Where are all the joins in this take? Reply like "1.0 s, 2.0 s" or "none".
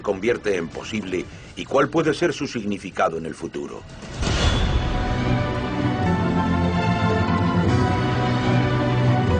none